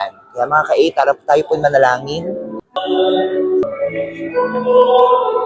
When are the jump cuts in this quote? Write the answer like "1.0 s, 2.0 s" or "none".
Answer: 2.8 s